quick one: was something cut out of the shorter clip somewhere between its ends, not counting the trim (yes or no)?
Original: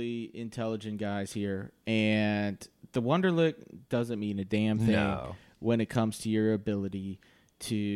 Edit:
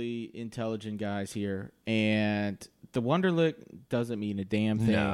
no